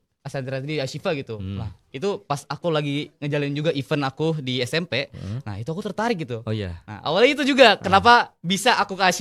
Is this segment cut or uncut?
uncut